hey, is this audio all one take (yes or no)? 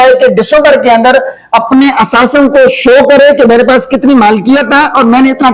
yes